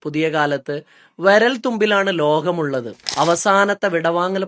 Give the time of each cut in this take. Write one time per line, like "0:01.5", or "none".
0:03.0